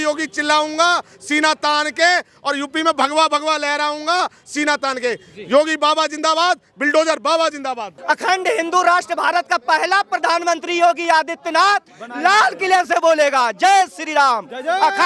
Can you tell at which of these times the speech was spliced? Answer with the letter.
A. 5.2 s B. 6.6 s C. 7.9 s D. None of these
C